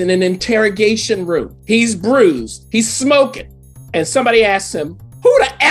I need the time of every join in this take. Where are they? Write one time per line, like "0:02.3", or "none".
0:01.5